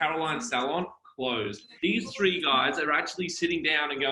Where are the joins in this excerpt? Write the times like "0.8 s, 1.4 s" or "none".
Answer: 1.6 s

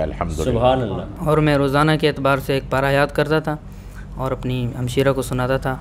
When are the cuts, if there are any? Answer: 1.1 s

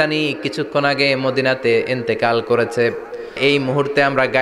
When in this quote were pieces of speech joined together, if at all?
3.4 s

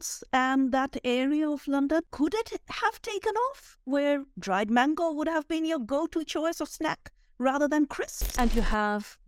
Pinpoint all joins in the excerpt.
2.1 s, 8.2 s

